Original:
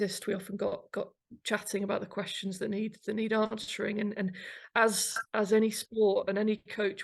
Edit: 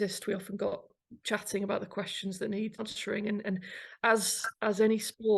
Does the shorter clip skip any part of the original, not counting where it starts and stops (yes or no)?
yes